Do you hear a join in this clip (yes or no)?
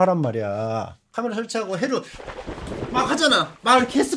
yes